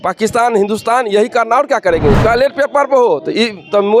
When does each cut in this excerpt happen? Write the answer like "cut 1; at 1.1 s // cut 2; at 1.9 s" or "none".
cut 1; at 2.2 s